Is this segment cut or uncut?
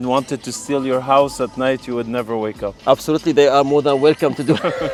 uncut